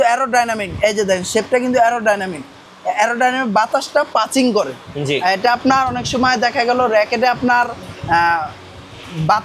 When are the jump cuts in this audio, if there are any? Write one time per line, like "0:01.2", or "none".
none